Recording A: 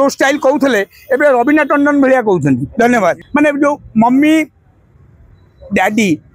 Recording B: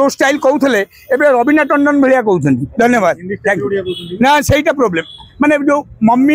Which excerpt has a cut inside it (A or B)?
A